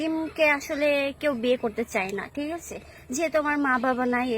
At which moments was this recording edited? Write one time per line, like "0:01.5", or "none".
none